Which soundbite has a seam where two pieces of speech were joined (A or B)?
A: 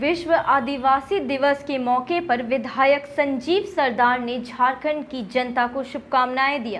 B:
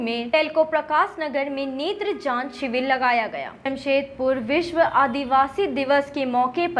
B